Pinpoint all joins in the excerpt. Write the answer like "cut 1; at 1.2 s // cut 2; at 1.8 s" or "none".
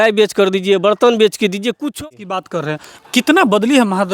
cut 1; at 2.0 s

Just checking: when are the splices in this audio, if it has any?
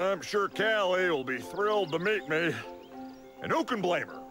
cut 1; at 1.9 s

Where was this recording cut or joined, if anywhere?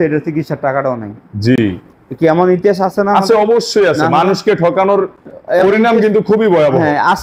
none

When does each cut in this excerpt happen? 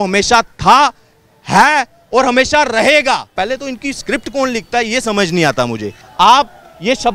cut 1; at 3.3 s // cut 2; at 6.0 s

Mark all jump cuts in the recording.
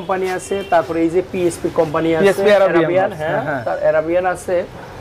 none

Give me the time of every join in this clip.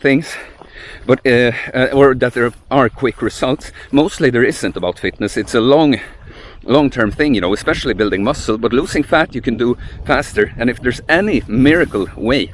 none

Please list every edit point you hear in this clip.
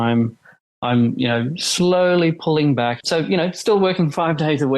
cut 1; at 3.0 s

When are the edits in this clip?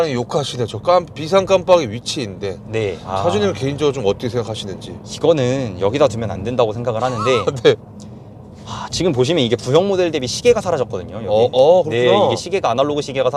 none

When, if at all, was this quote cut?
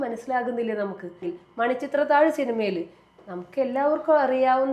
cut 1; at 1.3 s

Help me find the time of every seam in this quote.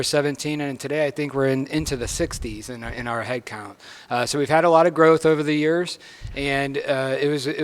none

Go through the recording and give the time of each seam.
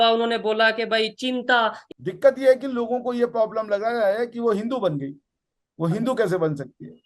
cut 1; at 1.8 s

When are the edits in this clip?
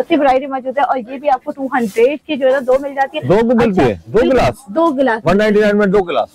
none

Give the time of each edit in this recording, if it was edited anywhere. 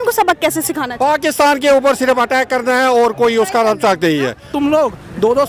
cut 1; at 4.5 s

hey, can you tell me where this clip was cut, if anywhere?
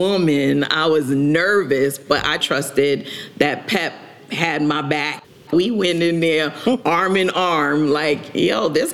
cut 1; at 2.0 s // cut 2; at 5.5 s

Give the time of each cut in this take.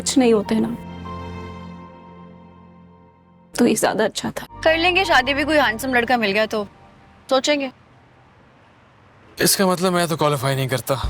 cut 1; at 4.5 s

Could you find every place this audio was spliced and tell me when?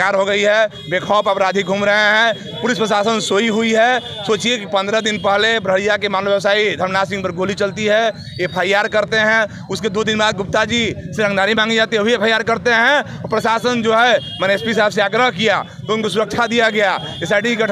none

